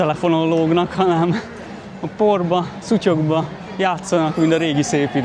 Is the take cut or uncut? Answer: uncut